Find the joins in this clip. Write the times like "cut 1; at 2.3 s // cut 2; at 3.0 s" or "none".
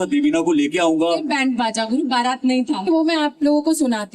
cut 1; at 2.9 s